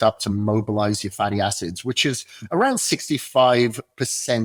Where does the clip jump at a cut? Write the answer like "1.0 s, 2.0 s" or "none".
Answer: none